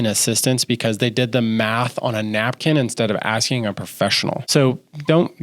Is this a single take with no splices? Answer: no; 1 cut; at 4.4 s

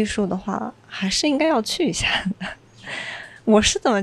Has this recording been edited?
no; 0 cuts

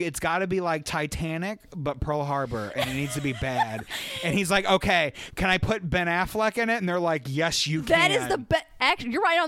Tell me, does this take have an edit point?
no; 0 cuts

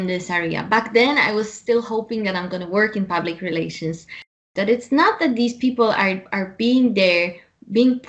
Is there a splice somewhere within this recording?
yes; 1 cut; at 4.4 s

